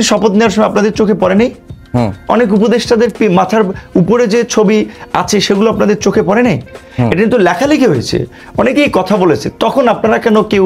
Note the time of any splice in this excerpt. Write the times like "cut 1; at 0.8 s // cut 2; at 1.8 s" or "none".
none